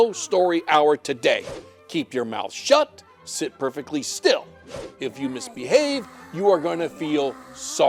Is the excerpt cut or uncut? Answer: uncut